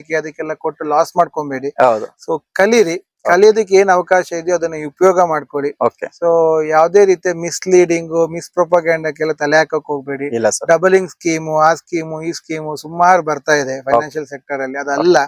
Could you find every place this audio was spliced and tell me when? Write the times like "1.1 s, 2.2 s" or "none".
none

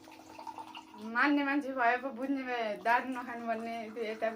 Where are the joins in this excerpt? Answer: 1.0 s

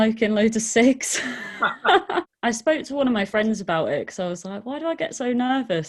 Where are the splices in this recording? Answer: 2.0 s

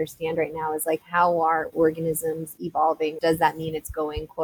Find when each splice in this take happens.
3.2 s

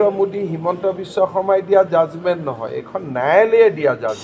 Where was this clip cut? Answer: none

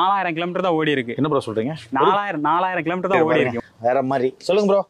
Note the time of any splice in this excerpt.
3.2 s

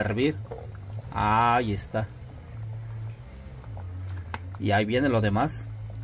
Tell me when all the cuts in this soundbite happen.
none

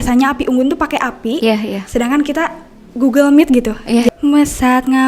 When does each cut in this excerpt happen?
4.1 s

